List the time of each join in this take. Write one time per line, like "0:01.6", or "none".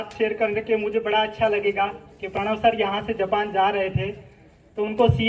none